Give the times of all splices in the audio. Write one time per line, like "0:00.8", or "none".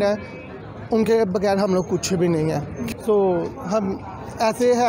none

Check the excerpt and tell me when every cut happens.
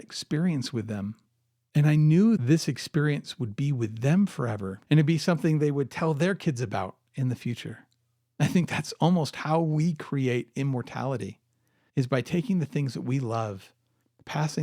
0:02.4
0:04.7

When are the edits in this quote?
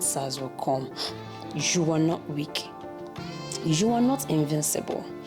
0:01.1

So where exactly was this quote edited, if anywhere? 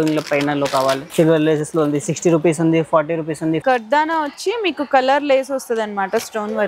0:01.0
0:03.6

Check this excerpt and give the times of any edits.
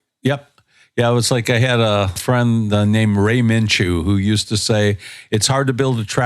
0:02.2

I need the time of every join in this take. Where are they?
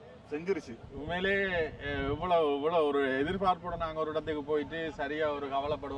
none

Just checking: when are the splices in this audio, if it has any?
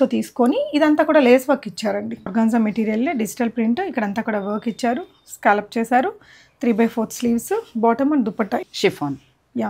0:02.3
0:08.6

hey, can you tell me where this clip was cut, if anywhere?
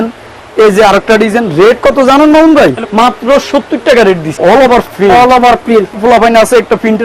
0:02.8
0:04.4
0:05.9

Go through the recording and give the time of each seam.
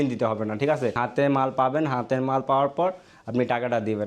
0:01.0

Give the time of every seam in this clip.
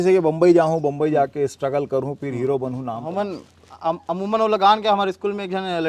0:03.0

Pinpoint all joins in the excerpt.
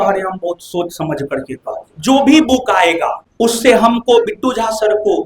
0:01.9

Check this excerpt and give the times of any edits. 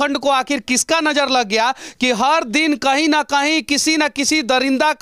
none

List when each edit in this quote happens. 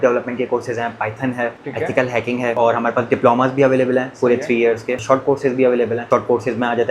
0:01.6
0:02.6
0:05.0
0:06.0

